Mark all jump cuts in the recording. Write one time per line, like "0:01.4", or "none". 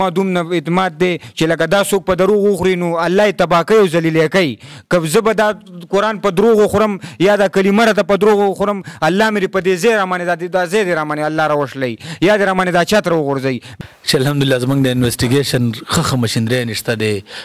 0:13.7